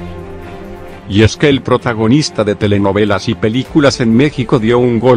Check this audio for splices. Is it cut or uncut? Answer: cut